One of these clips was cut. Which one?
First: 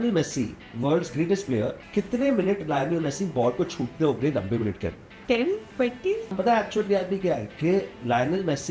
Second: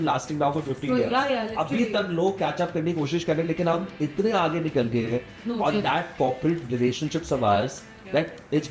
first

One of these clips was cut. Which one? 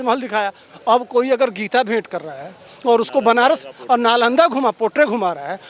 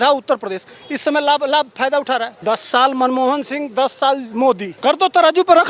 second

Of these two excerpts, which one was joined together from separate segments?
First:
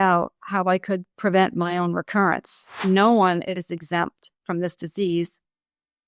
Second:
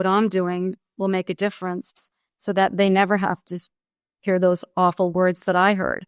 first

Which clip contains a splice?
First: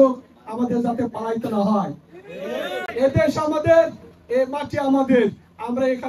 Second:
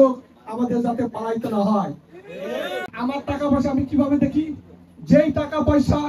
second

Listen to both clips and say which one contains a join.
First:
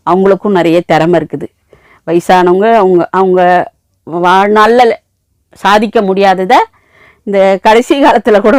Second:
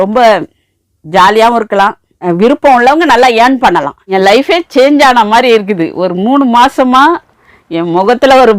second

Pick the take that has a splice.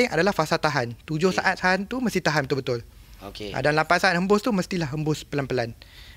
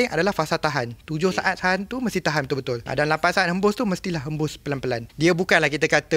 second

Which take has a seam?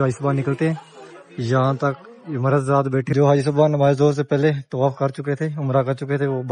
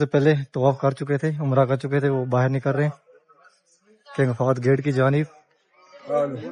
first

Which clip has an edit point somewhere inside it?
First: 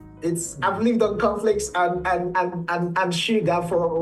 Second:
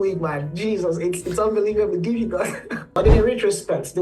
second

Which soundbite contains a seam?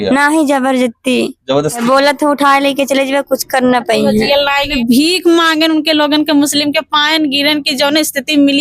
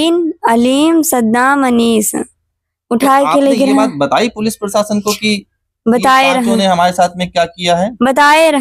first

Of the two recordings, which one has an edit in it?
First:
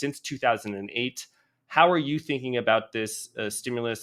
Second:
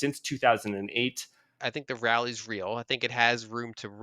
second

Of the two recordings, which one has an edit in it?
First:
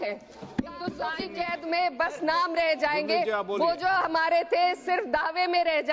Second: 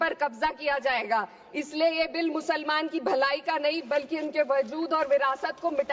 first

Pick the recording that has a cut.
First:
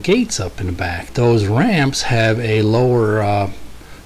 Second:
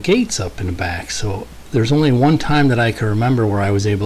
first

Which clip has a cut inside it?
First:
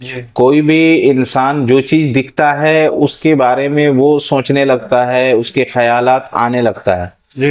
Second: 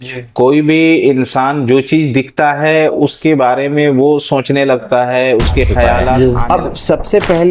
second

